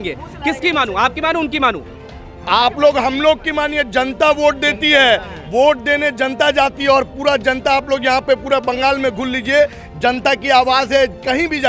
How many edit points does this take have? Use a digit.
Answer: 0